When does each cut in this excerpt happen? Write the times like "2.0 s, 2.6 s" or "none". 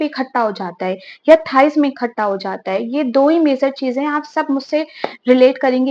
none